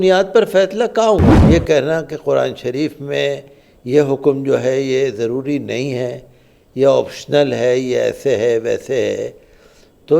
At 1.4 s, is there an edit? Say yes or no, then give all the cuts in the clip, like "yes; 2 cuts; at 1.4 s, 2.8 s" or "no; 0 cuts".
yes; 1 cut; at 1.4 s